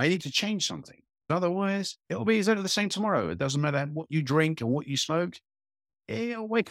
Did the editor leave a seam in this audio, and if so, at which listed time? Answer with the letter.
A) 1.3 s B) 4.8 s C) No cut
A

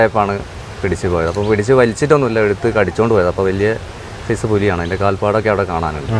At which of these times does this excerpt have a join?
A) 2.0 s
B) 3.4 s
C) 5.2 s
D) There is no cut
D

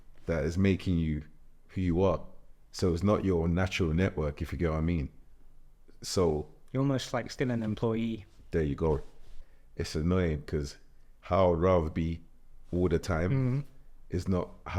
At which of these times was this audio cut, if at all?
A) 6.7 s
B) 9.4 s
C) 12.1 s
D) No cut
B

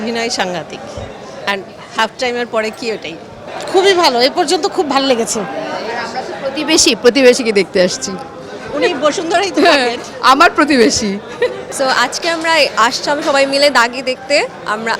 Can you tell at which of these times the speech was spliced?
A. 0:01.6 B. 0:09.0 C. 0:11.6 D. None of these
C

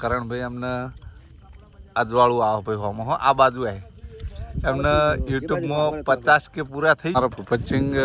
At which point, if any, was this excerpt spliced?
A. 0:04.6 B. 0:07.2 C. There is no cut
B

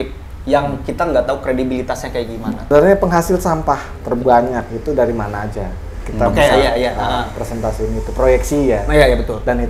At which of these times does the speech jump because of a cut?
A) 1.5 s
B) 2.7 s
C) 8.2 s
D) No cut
B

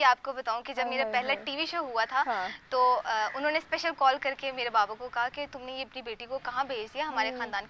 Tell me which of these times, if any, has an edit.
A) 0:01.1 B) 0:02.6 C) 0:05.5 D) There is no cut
D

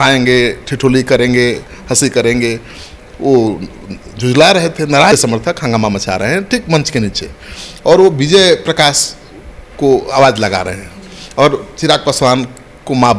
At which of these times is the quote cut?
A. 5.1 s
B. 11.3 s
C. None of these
A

